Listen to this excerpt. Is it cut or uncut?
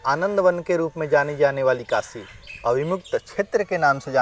uncut